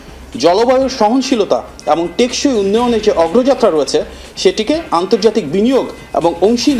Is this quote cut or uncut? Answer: uncut